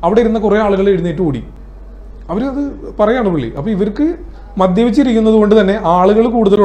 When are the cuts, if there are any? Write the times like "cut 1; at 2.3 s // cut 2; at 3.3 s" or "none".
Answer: none

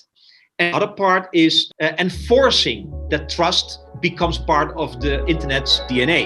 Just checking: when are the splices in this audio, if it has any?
cut 1; at 1.6 s // cut 2; at 3.9 s // cut 3; at 5.2 s

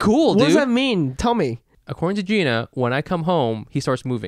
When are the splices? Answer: cut 1; at 1.7 s

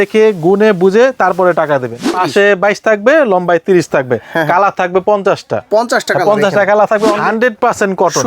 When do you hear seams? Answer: cut 1; at 2.1 s // cut 2; at 7.2 s

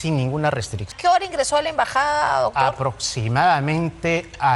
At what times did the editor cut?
cut 1; at 0.9 s

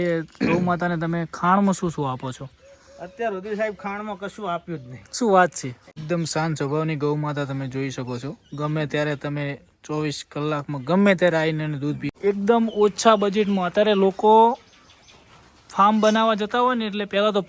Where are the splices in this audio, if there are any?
cut 1; at 5.9 s // cut 2; at 12.1 s

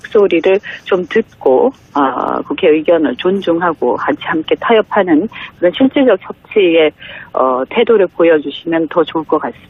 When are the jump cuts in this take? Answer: none

